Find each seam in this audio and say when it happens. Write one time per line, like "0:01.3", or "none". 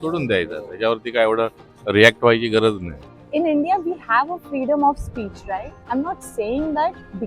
0:03.1
0:05.7